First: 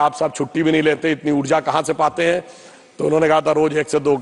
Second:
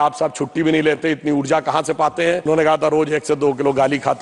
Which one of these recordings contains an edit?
second; 1 cut; at 2.5 s

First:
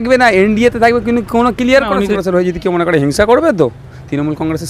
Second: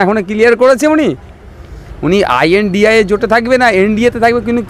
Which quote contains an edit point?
first; 1 cut; at 2.2 s

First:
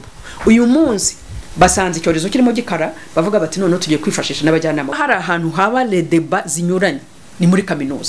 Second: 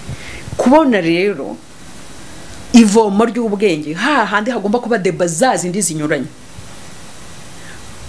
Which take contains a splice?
first; 1 cut; at 5.0 s

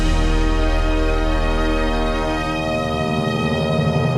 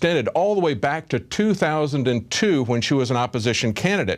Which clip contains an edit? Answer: second; 1 cut; at 1.0 s

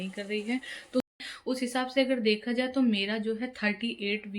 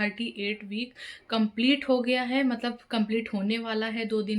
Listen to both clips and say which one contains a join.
first; 1 cut; at 1.2 s

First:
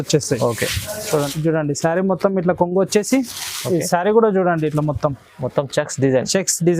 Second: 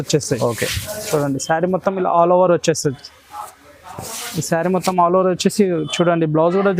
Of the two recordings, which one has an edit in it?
first; 1 cut; at 1.3 s

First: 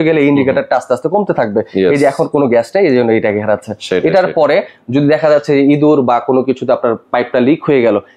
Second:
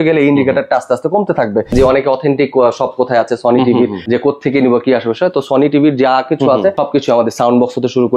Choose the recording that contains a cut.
second; 3 cuts; at 1.7 s, 4.0 s, 6.8 s

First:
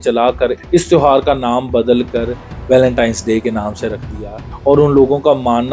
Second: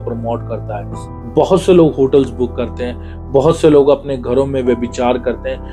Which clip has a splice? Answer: first; 1 cut; at 4.5 s

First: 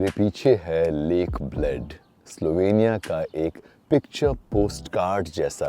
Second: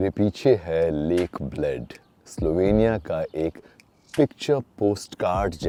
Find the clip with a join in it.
first; 1 cut; at 3.7 s

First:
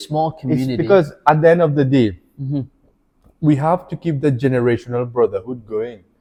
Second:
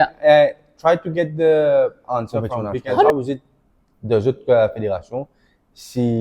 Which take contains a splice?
second; 1 cut; at 3.1 s

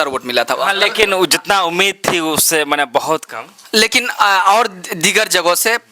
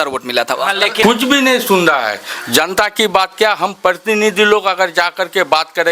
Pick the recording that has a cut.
second; 1 cut; at 1.0 s

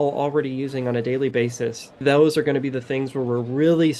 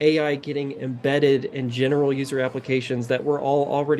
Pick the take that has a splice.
first; 1 cut; at 2.0 s

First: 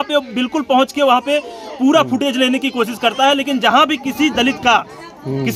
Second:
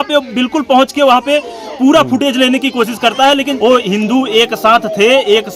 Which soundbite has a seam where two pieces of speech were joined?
second; 1 cut; at 3.5 s

